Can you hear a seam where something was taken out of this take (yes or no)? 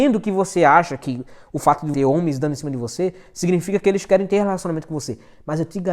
yes